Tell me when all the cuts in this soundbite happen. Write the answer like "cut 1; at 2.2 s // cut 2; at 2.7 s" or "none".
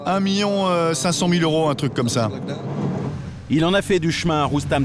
cut 1; at 3.3 s